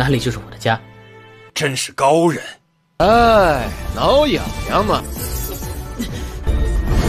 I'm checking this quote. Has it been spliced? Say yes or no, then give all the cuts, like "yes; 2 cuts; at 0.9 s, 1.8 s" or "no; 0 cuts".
yes; 1 cut; at 3.0 s